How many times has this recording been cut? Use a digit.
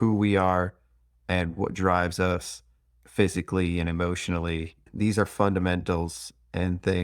1